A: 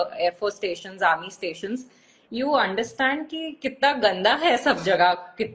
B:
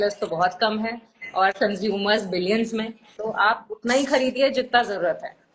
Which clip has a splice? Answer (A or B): B